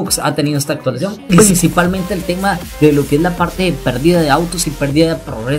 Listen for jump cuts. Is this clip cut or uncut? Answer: cut